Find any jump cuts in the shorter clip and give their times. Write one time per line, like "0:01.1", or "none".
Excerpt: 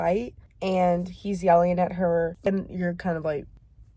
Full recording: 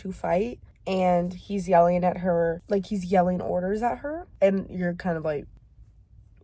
0:02.5